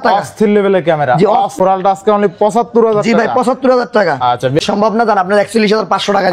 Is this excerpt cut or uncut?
cut